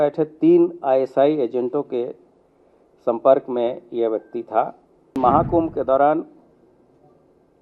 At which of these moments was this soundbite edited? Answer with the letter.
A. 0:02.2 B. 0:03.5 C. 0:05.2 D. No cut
C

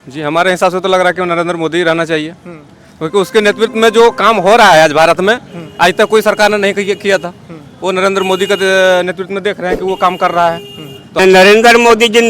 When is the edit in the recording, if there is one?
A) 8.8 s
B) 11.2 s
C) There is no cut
B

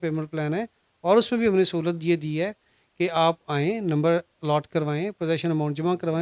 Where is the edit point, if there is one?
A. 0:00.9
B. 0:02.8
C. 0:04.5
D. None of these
D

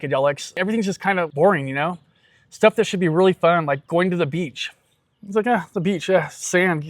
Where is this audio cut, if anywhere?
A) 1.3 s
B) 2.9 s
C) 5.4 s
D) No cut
A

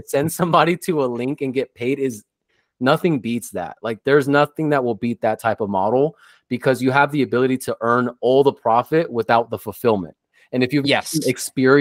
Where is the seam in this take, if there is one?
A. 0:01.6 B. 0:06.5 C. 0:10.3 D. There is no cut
D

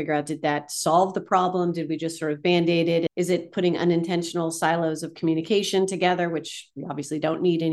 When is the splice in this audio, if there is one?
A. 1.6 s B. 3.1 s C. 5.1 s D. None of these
B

